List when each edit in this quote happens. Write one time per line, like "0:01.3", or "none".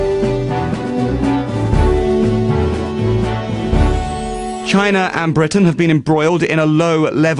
none